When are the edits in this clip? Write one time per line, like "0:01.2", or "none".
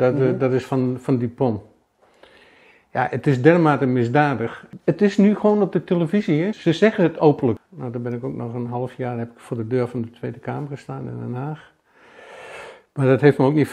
0:07.6